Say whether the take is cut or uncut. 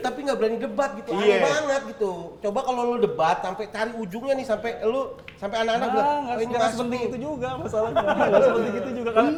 uncut